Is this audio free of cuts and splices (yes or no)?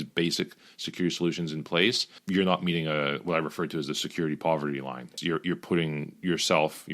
no